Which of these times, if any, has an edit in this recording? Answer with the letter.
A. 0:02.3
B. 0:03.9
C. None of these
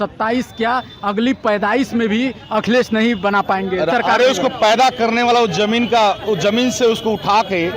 B